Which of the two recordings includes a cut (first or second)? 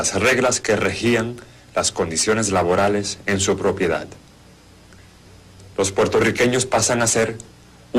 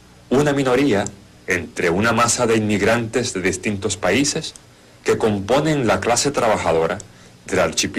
first